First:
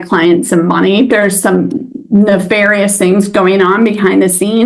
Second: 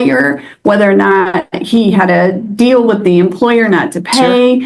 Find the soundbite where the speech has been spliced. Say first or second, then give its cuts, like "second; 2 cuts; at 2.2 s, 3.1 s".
first; 1 cut; at 1.1 s